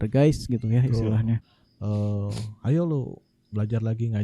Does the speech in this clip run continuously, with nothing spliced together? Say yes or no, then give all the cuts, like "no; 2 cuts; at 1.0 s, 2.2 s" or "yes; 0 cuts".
no; 1 cut; at 1.6 s